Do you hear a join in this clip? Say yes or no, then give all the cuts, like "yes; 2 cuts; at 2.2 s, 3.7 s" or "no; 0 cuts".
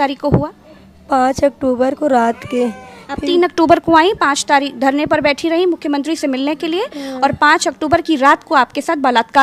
no; 0 cuts